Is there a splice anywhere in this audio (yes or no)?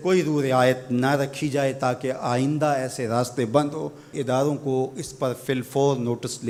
no